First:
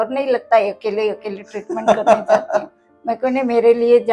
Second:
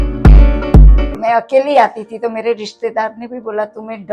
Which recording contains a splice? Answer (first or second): second